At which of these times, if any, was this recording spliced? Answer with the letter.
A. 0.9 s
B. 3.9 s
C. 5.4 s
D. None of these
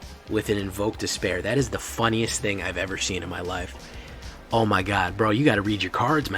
B